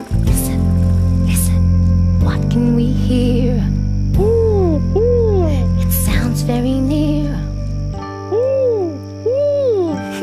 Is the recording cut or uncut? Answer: cut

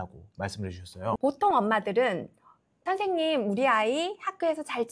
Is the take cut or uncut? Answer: cut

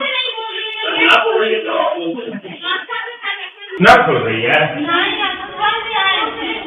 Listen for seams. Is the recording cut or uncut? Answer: cut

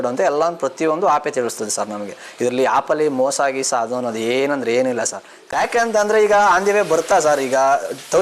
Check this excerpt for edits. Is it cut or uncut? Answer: cut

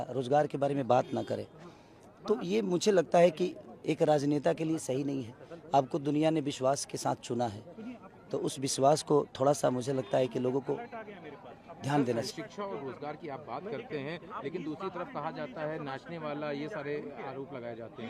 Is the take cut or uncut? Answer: uncut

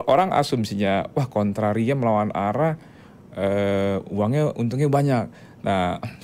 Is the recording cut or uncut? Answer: uncut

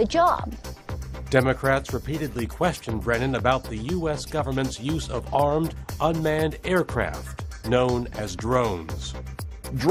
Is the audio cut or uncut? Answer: uncut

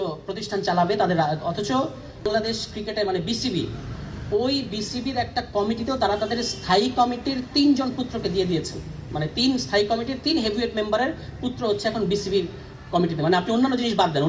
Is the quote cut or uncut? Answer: cut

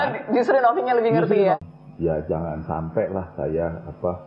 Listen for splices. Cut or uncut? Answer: cut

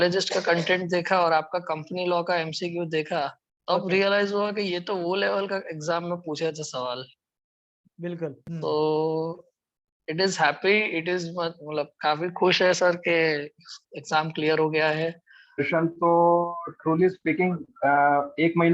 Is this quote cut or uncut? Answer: cut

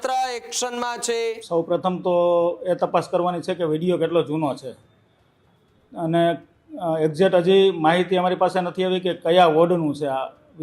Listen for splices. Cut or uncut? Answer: cut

